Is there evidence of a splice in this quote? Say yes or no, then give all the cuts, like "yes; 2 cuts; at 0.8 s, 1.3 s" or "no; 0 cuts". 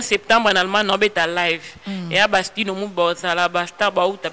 no; 0 cuts